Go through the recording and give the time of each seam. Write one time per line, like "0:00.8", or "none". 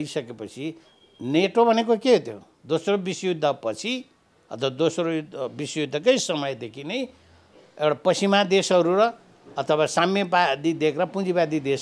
none